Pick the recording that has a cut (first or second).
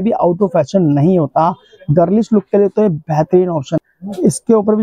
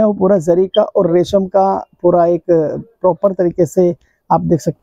first